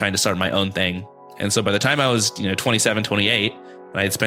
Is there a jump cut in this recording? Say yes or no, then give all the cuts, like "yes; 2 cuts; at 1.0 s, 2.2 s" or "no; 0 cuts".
no; 0 cuts